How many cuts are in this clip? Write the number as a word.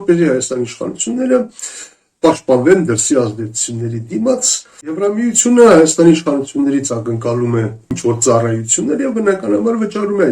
two